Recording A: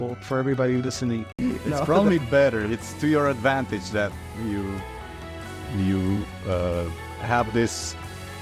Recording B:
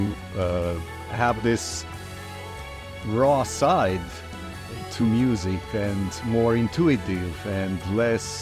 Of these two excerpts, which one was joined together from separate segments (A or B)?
A